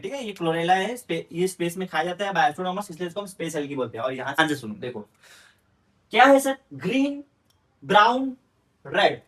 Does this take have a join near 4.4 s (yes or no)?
yes